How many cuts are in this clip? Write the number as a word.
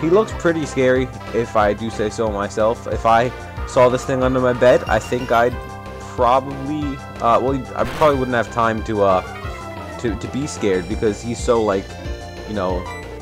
zero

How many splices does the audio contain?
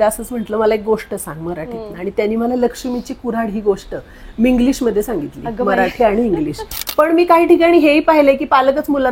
one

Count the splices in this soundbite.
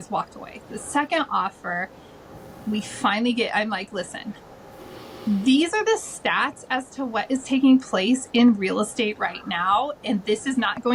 zero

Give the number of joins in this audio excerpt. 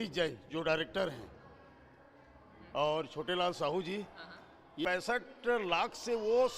one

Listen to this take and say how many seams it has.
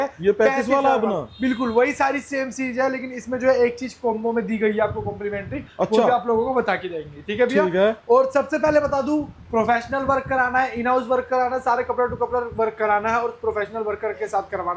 zero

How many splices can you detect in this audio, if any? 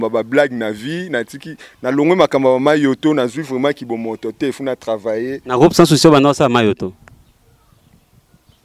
zero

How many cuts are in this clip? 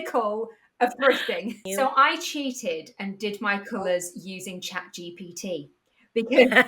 one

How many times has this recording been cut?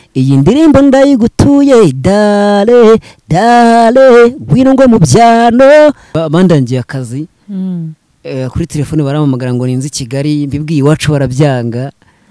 one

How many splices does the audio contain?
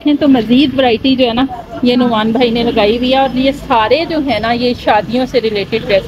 zero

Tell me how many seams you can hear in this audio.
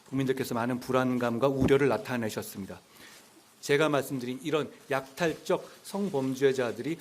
one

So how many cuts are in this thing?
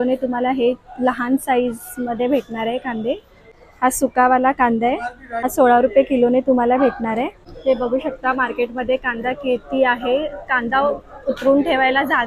three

